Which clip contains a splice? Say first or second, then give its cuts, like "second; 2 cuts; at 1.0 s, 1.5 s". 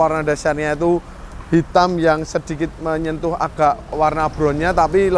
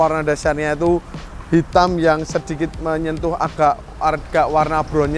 first; 1 cut; at 3.9 s